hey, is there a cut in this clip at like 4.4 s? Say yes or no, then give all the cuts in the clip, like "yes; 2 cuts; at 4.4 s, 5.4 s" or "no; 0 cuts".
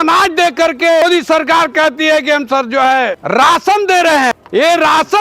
yes; 3 cuts; at 1.0 s, 3.2 s, 4.4 s